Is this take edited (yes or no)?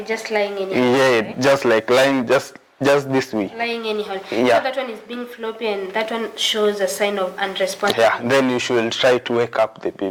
no